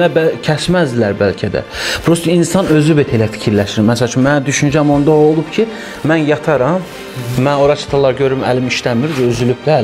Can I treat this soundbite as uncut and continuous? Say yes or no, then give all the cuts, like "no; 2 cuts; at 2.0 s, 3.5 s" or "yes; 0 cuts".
yes; 0 cuts